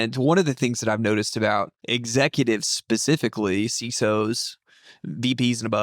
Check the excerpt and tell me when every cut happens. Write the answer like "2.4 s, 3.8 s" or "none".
1.8 s